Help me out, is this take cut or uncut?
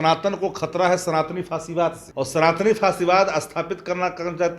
cut